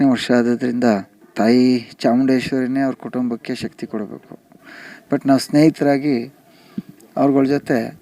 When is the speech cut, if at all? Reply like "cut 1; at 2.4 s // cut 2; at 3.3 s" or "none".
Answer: cut 1; at 1.2 s